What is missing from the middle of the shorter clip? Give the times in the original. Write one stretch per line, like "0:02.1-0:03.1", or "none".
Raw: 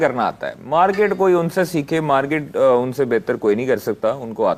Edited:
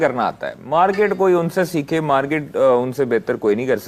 none